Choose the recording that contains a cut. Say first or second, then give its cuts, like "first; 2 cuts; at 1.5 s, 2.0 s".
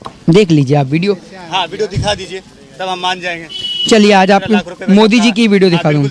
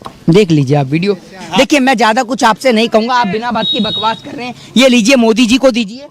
second; 1 cut; at 1.6 s